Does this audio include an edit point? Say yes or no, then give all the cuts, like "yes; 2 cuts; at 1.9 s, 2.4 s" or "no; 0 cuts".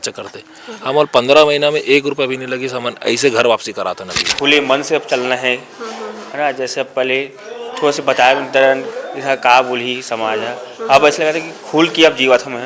yes; 1 cut; at 4.2 s